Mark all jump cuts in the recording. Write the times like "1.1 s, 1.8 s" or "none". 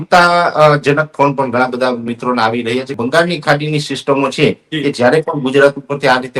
3.0 s